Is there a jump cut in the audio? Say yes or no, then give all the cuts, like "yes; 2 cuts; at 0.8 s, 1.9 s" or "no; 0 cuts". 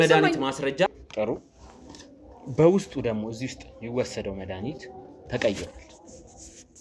yes; 1 cut; at 0.9 s